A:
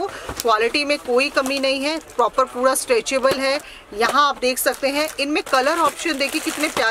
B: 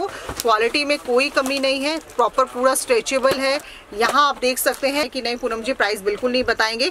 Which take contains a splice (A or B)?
B